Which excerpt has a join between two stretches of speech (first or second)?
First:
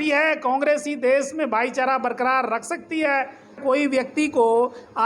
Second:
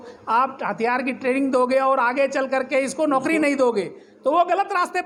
first